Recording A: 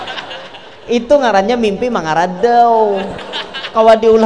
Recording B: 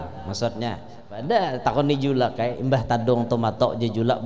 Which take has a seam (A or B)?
B